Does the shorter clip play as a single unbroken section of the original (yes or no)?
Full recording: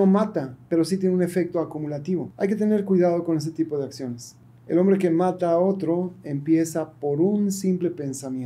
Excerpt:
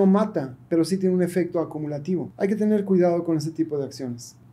yes